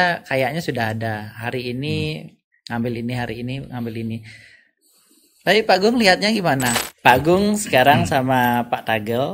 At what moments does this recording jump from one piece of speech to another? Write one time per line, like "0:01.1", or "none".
0:06.8

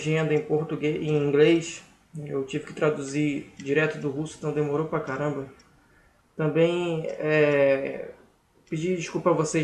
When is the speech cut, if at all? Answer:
0:07.6

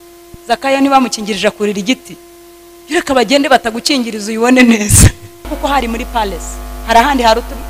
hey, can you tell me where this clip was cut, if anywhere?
0:05.5

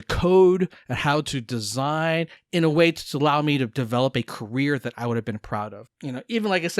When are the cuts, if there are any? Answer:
0:02.4
0:05.8

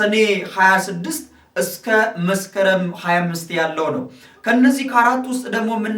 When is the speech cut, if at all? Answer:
none

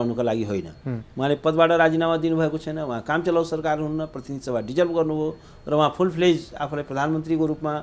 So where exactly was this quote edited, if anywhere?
none

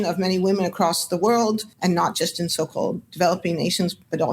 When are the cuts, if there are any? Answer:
none

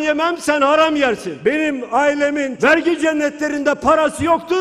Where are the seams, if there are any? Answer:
0:01.3
0:02.5

